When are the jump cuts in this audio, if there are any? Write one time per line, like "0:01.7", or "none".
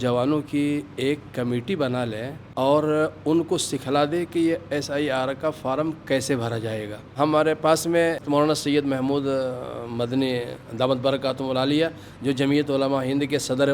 0:02.4
0:07.1
0:08.2